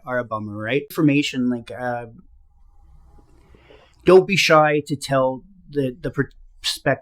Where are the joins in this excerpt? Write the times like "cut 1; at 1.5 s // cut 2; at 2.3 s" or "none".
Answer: cut 1; at 0.9 s